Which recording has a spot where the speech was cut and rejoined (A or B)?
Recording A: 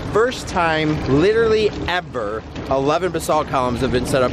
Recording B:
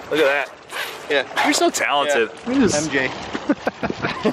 B